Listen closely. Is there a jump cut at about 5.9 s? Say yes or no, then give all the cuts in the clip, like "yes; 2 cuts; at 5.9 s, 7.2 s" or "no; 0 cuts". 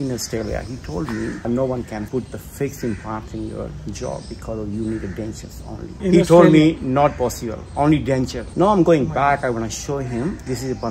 yes; 2 cuts; at 5.9 s, 8.4 s